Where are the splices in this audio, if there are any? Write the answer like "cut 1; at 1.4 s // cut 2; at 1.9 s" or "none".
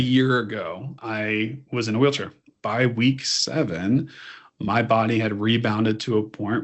cut 1; at 0.9 s // cut 2; at 2.5 s